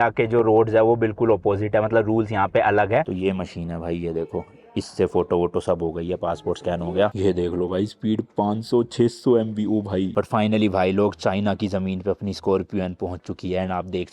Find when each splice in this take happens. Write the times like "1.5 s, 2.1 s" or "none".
3.0 s, 7.1 s, 10.1 s